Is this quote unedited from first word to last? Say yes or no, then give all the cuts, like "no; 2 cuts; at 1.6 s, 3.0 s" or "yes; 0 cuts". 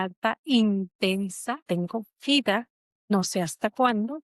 no; 2 cuts; at 1.6 s, 3.1 s